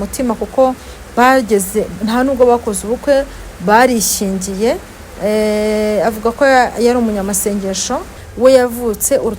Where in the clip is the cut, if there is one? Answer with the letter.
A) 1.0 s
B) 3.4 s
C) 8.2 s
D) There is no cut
C